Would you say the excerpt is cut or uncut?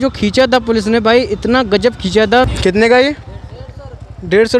cut